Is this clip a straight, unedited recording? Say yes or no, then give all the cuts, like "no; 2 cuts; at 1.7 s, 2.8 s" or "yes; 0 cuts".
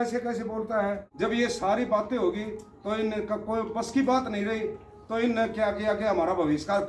no; 1 cut; at 1.1 s